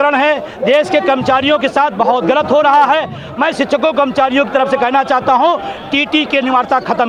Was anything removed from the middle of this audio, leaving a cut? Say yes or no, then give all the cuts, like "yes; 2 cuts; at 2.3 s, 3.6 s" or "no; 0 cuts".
no; 0 cuts